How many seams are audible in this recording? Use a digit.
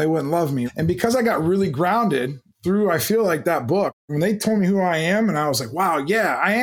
1